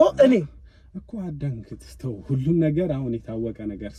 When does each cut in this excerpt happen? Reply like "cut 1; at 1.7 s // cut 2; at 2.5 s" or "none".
none